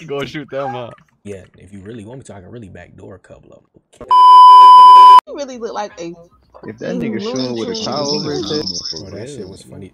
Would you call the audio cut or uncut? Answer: cut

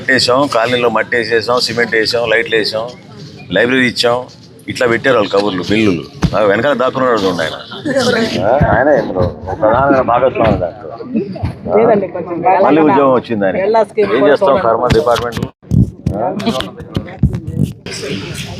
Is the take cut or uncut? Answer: uncut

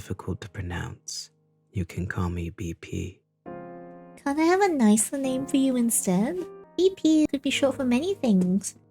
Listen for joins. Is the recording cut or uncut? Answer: cut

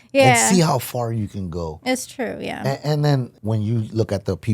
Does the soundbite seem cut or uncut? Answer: cut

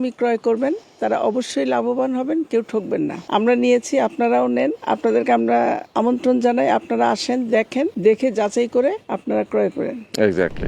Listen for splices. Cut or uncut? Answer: cut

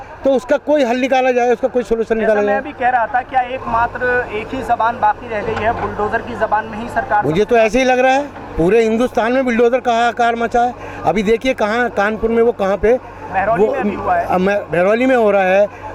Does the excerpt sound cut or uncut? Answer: uncut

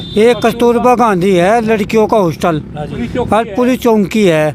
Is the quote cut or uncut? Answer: uncut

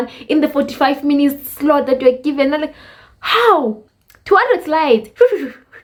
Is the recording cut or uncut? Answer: uncut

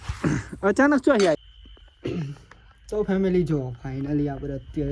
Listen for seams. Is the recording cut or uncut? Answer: cut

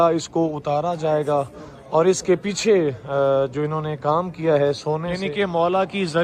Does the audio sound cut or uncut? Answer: cut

